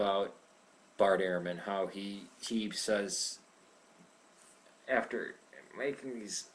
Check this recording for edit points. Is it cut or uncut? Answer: cut